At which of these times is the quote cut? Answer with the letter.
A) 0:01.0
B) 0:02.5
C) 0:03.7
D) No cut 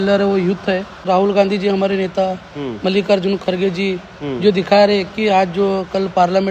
A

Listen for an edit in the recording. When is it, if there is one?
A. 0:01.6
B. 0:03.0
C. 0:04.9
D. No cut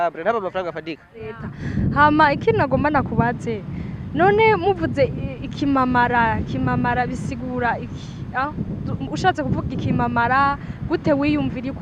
A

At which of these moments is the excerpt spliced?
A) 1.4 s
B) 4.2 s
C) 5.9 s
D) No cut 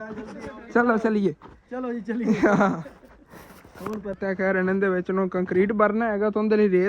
B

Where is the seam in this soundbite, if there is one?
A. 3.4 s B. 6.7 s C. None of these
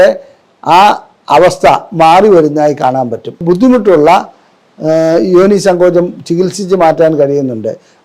A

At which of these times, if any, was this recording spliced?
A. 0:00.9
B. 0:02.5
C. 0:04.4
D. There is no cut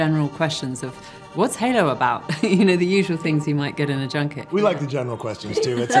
C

